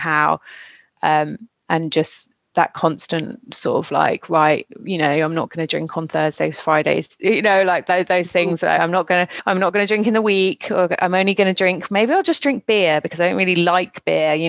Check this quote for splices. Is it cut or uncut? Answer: cut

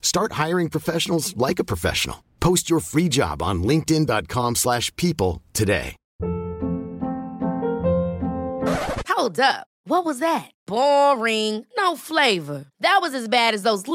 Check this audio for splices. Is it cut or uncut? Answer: cut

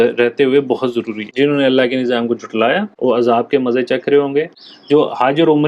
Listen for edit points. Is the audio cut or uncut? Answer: cut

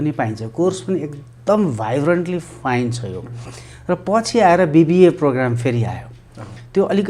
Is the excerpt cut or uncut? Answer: uncut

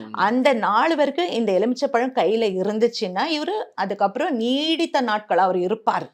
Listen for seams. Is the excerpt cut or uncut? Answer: uncut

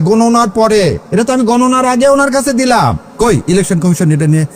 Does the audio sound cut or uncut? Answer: cut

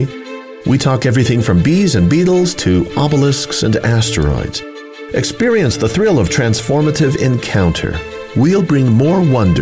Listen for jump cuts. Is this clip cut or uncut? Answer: uncut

